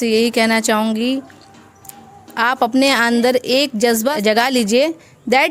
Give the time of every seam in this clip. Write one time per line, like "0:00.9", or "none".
0:04.2